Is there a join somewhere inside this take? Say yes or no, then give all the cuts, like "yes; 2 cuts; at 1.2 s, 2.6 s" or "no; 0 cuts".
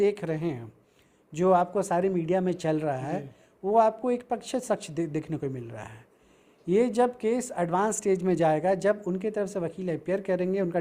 no; 0 cuts